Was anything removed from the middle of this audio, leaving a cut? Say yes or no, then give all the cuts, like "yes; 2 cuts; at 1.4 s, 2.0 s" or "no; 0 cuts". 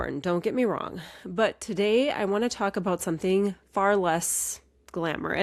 no; 0 cuts